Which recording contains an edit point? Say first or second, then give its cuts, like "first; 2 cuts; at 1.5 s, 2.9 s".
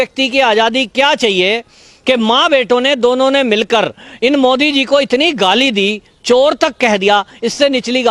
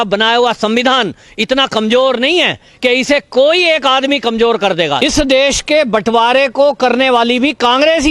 second; 1 cut; at 5.0 s